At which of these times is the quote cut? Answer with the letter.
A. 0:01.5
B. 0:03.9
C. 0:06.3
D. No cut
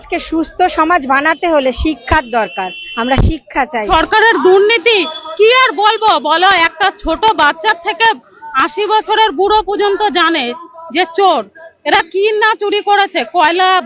B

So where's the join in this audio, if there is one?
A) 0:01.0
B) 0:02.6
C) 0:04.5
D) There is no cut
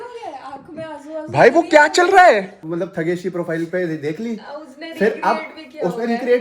B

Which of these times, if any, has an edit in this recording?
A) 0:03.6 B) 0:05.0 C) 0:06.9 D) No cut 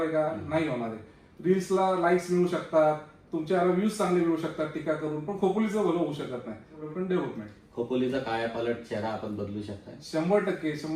C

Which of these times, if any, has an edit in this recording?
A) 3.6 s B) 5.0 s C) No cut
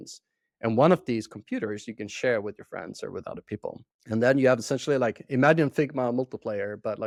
C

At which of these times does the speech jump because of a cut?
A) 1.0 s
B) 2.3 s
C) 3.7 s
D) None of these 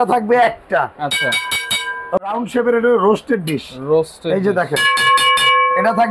B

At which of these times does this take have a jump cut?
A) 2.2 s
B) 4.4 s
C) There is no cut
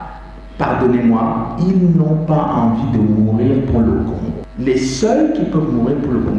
B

